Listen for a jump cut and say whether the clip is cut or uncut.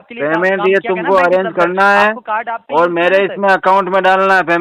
uncut